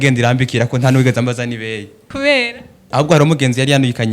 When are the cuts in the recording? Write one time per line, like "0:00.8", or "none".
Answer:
0:02.0
0:02.8